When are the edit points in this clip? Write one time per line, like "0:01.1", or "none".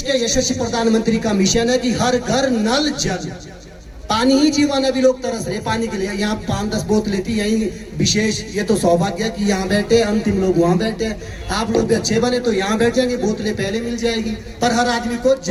none